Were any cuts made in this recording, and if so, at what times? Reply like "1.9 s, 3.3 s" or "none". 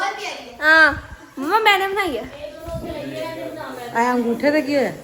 none

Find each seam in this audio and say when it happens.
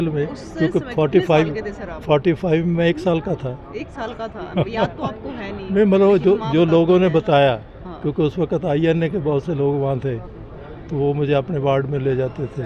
none

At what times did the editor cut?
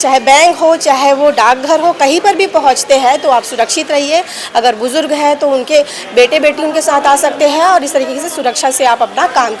none

